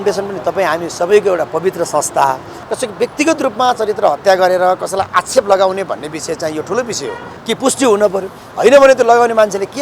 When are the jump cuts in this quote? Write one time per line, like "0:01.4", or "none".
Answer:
0:02.6
0:07.3